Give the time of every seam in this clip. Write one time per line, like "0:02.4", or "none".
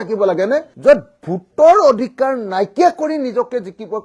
none